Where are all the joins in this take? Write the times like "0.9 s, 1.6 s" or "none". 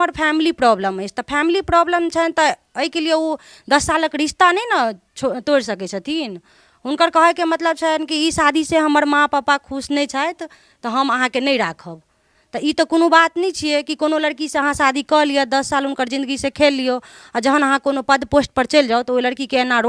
none